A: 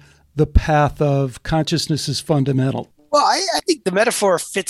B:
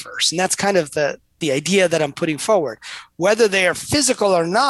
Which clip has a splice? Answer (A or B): A